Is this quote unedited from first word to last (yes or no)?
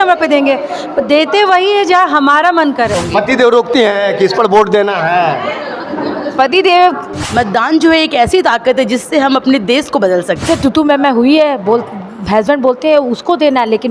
no